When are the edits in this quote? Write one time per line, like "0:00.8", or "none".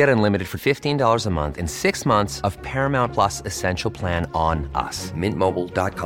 none

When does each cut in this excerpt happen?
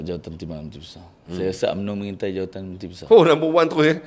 none

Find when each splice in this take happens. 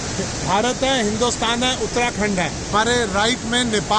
0:02.7

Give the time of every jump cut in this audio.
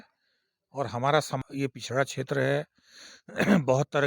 0:01.4

